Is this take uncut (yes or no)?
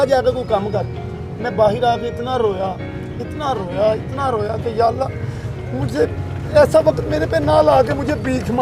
yes